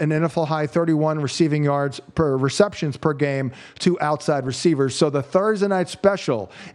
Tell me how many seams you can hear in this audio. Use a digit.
0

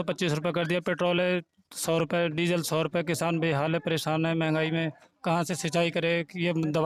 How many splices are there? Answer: 0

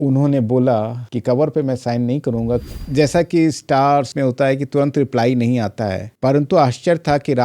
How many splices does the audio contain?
1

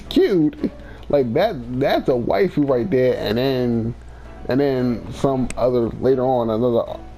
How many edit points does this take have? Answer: 0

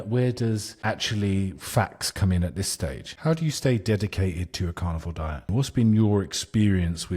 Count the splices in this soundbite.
2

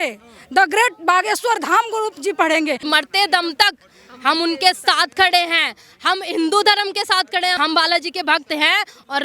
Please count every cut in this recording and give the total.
2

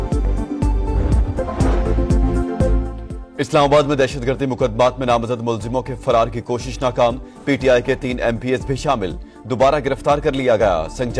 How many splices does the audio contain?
1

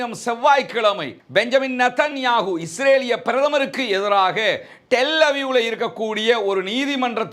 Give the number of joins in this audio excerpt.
0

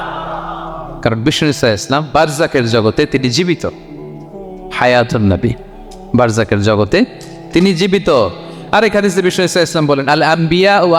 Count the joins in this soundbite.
0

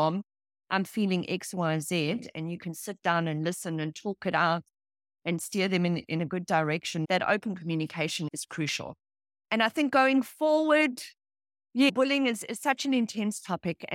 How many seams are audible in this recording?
0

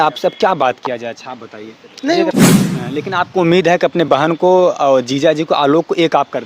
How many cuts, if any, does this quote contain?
2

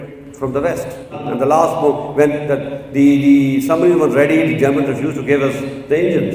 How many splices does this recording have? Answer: 1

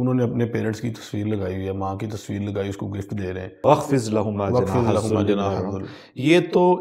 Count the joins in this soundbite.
1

